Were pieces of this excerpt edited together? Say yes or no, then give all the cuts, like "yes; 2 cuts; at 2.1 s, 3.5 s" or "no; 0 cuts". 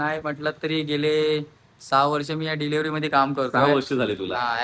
no; 0 cuts